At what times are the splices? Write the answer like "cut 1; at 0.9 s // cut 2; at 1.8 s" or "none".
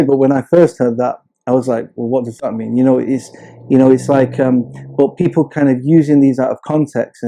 none